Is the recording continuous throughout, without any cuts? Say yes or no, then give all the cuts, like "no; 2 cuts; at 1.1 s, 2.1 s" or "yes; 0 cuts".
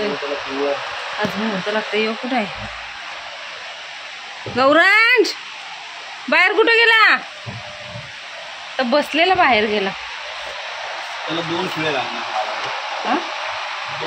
yes; 0 cuts